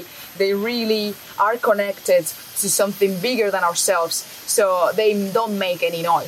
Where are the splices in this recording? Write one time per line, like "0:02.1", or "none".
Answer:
none